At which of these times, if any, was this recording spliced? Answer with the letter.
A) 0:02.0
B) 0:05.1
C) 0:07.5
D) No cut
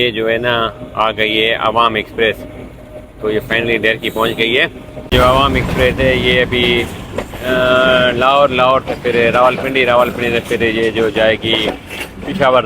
B